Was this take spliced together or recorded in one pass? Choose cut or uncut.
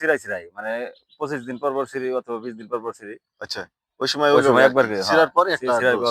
uncut